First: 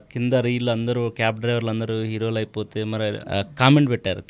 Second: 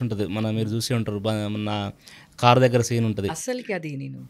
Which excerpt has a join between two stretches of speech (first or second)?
first